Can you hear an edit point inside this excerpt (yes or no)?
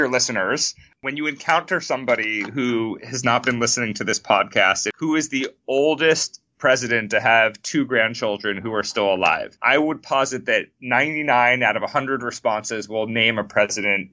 yes